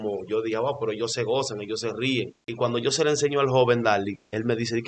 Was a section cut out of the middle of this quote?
yes; 1 cut; at 2.4 s

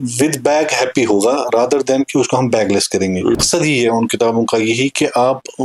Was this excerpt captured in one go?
no; 1 cut; at 3.4 s

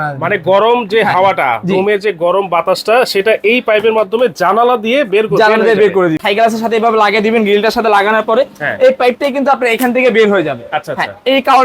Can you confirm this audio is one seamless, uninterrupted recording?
no; 1 cut; at 6.2 s

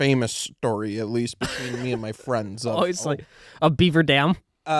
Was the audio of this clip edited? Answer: no; 0 cuts

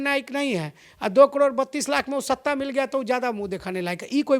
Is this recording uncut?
yes; 0 cuts

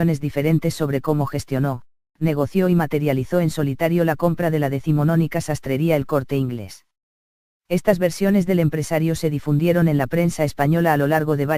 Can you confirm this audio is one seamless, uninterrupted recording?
no; 1 cut; at 4.3 s

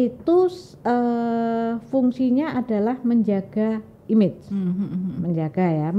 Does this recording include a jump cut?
no; 0 cuts

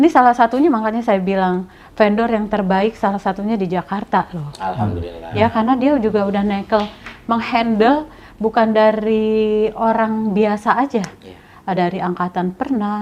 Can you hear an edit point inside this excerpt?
no; 0 cuts

